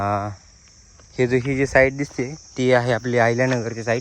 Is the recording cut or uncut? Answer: uncut